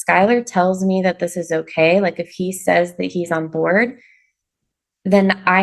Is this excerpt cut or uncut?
uncut